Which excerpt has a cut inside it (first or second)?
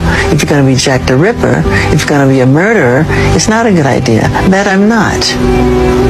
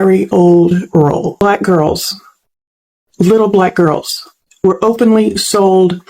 second